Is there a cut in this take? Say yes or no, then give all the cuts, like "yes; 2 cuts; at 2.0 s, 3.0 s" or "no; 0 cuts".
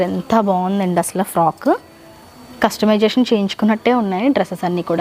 no; 0 cuts